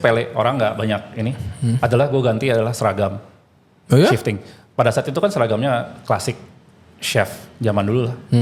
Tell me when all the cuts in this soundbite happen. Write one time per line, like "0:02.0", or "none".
none

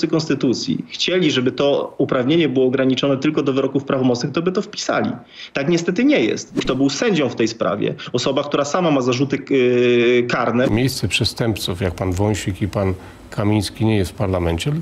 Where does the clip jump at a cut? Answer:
0:06.5
0:10.7

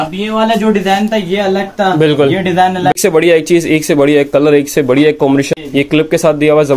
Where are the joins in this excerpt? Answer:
0:03.0
0:05.5

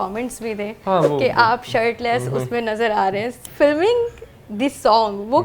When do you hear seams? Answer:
0:03.3

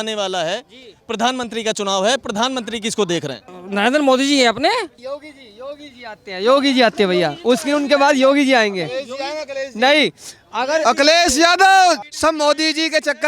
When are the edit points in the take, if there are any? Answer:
0:03.5
0:05.0
0:12.1

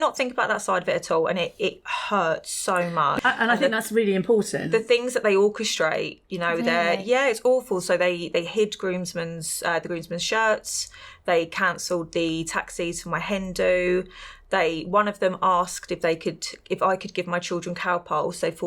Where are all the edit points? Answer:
0:03.1

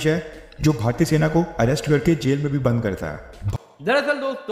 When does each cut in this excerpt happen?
0:03.3

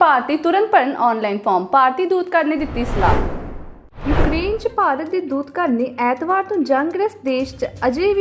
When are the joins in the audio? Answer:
none

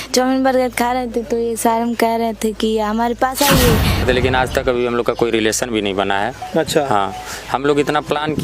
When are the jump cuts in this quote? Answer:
0:04.0

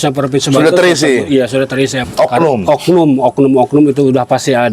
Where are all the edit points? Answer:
0:02.0

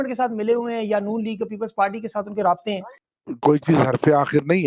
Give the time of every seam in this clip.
0:02.8

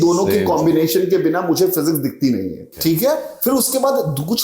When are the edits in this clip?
0:02.7

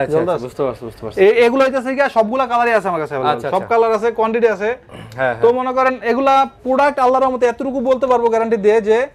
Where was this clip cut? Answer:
none

